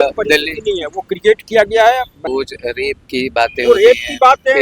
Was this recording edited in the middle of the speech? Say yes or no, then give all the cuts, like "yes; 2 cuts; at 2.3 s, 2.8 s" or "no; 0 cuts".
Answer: yes; 1 cut; at 2.2 s